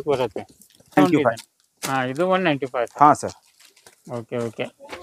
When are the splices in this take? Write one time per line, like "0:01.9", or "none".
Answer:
0:01.0

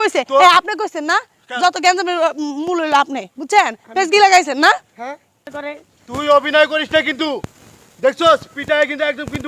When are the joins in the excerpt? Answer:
0:05.5

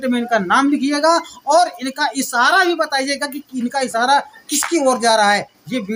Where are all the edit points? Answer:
none

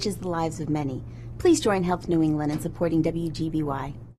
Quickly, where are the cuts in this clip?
none

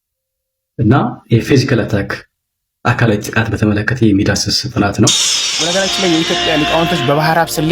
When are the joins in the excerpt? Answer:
0:05.6

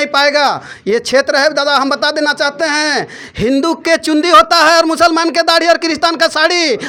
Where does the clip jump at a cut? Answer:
none

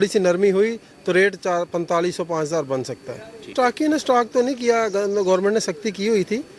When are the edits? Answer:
0:03.5

